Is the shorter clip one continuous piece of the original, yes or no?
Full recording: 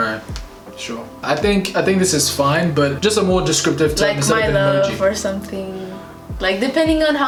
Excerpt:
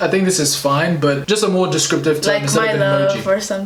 yes